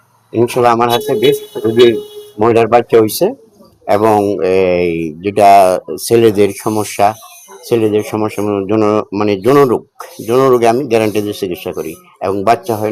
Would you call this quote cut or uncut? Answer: uncut